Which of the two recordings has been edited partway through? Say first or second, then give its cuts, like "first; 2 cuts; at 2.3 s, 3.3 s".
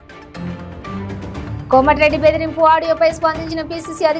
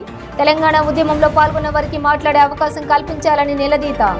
first; 1 cut; at 1.0 s